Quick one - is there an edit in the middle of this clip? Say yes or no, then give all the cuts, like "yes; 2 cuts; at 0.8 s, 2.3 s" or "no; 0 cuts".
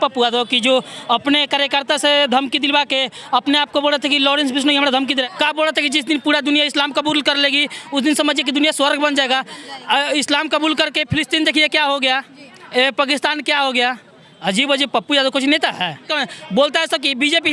yes; 2 cuts; at 5.2 s, 16.1 s